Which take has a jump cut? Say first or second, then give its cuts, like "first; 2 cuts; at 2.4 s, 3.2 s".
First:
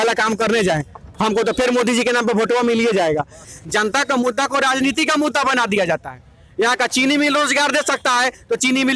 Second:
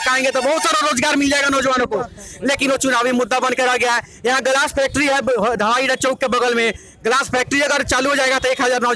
first; 1 cut; at 3.4 s